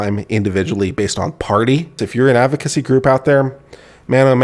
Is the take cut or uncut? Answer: cut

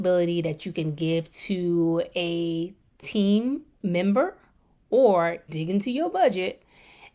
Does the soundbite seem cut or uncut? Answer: cut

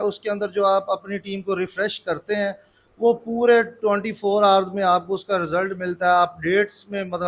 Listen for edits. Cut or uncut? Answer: uncut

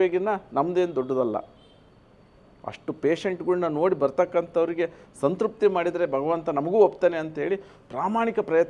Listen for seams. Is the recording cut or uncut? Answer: uncut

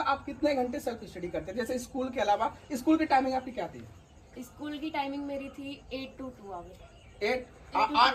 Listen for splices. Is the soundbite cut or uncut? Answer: uncut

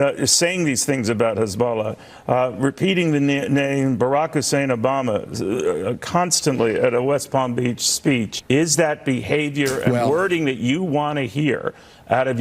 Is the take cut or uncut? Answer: cut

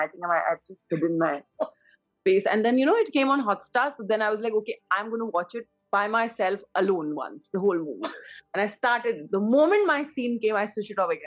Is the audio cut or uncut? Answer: uncut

